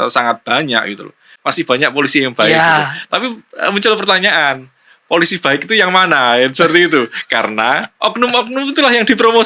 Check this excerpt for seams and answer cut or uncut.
cut